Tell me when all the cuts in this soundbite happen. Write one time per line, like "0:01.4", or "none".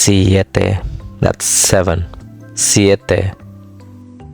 0:03.4